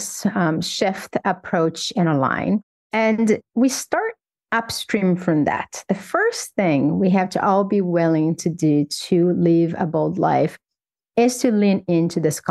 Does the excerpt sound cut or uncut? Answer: cut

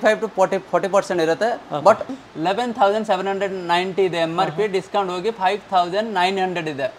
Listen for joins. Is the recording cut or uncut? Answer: cut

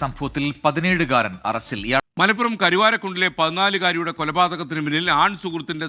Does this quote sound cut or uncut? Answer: cut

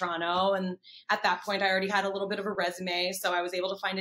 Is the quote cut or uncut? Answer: uncut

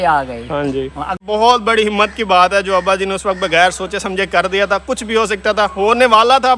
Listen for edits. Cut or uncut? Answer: cut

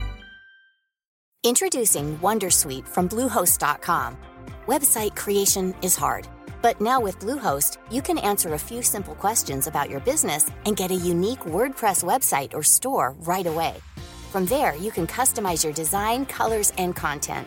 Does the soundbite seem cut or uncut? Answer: cut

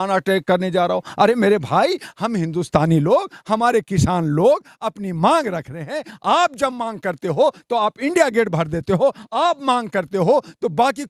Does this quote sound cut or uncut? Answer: uncut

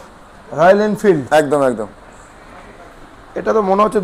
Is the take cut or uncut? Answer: uncut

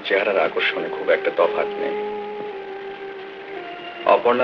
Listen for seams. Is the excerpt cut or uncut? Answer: uncut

